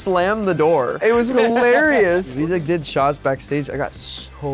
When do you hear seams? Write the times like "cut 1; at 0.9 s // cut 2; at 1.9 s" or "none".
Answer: cut 1; at 0.9 s // cut 2; at 2.3 s